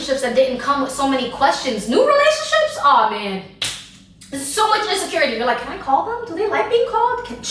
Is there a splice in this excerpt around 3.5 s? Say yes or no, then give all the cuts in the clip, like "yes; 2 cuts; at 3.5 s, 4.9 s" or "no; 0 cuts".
no; 0 cuts